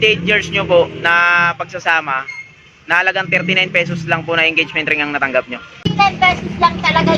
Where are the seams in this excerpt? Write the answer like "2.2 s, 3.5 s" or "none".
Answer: 5.8 s